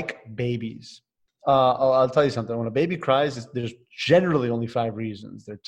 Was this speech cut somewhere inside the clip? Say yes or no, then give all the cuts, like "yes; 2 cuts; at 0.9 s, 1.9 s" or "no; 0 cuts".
no; 0 cuts